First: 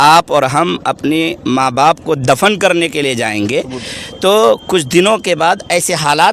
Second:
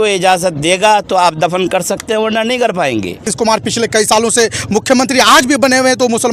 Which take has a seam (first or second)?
second